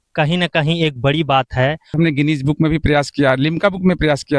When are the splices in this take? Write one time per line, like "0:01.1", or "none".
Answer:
0:01.9